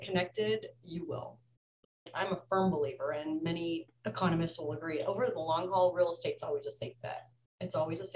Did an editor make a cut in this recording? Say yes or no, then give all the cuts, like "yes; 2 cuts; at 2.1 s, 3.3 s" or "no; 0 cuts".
yes; 2 cuts; at 2.1 s, 3.9 s